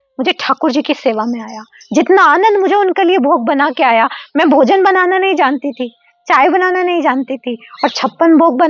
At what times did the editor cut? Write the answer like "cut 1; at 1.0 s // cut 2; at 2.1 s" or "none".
none